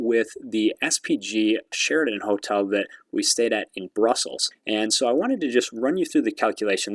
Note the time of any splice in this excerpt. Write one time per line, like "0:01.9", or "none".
0:01.7